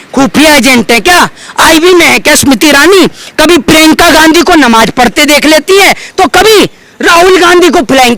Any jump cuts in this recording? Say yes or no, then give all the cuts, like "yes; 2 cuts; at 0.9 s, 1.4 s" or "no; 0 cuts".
no; 0 cuts